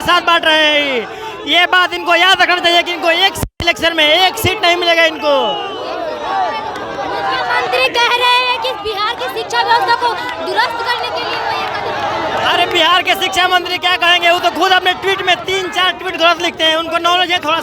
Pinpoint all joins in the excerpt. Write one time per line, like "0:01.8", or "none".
none